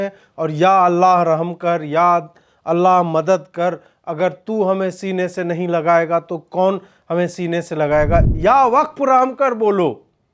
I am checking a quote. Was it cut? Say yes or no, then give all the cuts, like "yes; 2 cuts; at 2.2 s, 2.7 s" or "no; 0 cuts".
yes; 1 cut; at 8.3 s